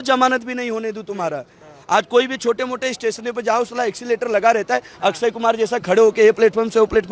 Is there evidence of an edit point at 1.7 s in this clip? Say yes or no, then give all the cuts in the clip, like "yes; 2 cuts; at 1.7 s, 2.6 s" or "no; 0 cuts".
no; 0 cuts